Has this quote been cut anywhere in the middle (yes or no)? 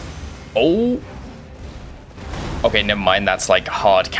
no